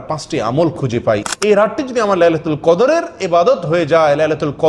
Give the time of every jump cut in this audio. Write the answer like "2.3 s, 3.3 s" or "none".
1.3 s